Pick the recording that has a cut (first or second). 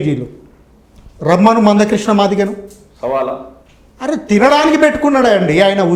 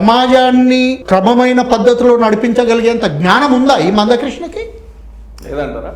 second